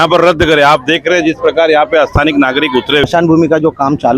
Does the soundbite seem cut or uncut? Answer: cut